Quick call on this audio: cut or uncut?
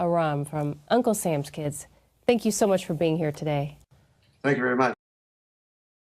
uncut